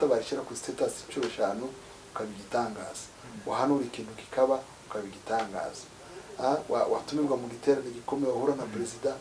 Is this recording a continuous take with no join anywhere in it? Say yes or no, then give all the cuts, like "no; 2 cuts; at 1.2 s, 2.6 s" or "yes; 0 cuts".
yes; 0 cuts